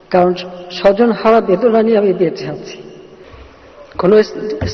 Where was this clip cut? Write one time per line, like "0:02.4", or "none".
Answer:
0:03.3